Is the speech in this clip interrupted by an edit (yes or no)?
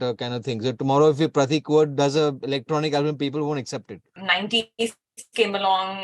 yes